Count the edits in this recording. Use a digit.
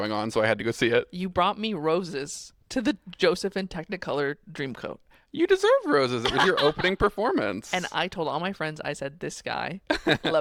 0